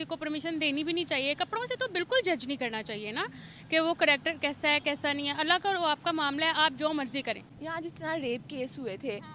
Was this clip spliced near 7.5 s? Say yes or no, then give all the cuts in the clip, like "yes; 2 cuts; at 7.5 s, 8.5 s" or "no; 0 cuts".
yes; 1 cut; at 7.5 s